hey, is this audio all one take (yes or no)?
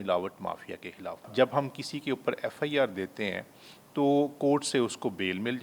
no